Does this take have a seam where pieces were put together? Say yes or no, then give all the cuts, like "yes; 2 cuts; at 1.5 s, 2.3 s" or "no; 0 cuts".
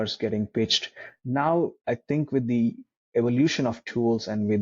yes; 1 cut; at 1.1 s